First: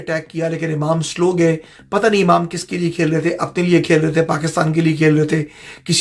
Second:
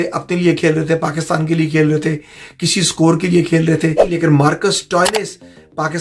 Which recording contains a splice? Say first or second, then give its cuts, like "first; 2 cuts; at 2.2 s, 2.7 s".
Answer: second; 1 cut; at 4.1 s